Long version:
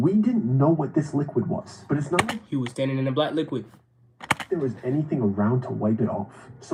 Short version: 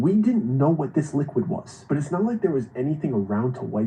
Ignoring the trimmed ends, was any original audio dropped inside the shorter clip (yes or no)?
yes